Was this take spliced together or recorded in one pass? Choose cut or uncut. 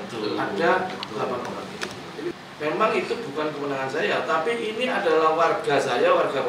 cut